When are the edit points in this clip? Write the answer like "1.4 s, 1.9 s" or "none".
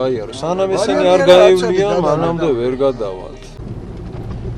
3.6 s